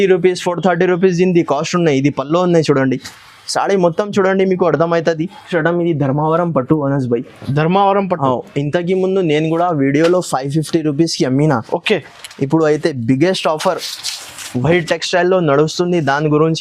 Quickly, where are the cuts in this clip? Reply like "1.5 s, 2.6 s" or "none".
5.5 s